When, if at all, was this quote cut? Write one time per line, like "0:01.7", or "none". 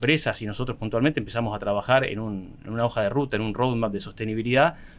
none